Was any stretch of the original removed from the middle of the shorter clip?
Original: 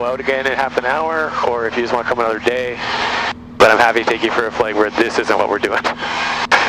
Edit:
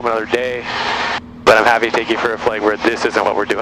no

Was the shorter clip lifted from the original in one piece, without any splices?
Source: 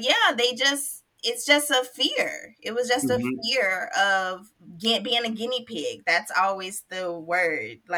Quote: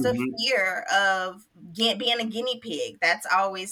yes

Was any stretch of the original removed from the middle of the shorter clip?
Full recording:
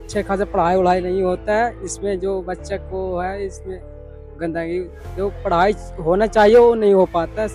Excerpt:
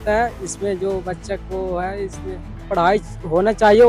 yes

